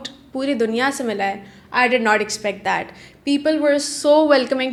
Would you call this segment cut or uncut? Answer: uncut